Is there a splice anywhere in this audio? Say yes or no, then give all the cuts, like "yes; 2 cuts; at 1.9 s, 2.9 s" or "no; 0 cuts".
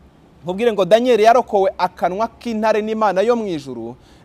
no; 0 cuts